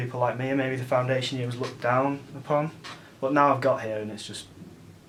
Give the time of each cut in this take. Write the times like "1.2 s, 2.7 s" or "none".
none